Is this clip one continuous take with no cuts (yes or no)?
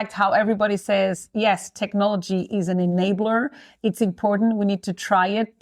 yes